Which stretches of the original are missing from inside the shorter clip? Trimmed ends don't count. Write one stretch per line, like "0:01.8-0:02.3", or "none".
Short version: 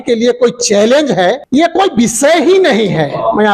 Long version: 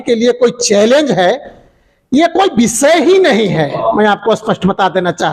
0:01.4-0:02.0